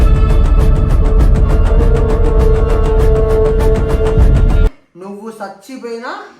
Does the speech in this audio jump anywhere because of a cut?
yes; 1 cut; at 4.8 s

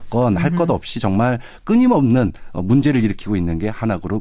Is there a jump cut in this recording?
yes; 1 cut; at 1.7 s

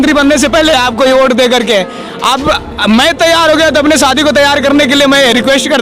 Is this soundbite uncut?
yes; 0 cuts

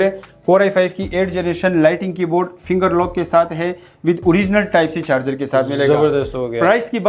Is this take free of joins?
yes; 0 cuts

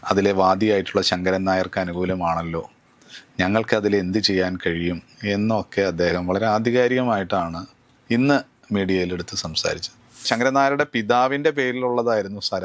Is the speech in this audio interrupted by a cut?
yes; 1 cut; at 10.3 s

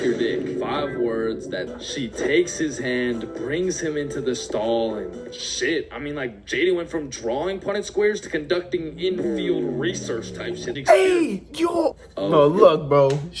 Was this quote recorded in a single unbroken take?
no; 3 cuts; at 1.7 s, 10.7 s, 12.1 s

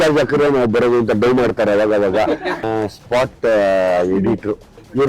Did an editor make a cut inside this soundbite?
yes; 1 cut; at 2.6 s

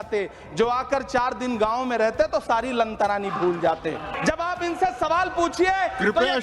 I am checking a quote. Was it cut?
yes; 1 cut; at 4.1 s

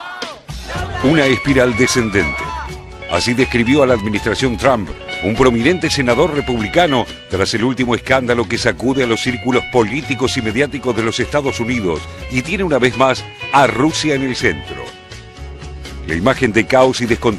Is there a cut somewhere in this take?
no; 0 cuts

